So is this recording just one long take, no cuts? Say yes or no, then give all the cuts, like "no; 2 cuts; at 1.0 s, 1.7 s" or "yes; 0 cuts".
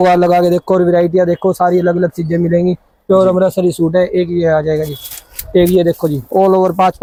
yes; 0 cuts